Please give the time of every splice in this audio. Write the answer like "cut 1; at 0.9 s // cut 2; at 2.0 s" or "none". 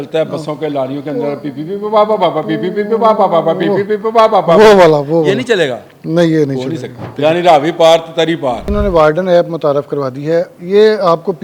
cut 1; at 7.0 s // cut 2; at 8.7 s